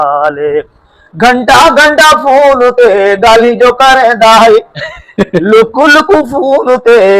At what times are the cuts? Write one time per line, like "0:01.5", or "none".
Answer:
none